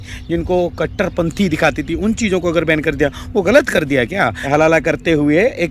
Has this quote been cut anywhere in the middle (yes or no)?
yes